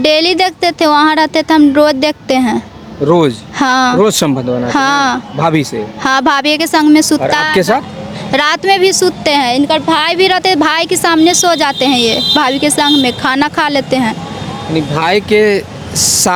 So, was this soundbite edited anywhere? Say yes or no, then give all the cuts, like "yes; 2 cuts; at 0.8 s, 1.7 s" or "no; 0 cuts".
no; 0 cuts